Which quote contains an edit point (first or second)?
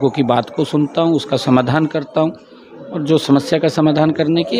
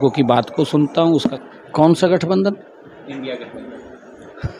second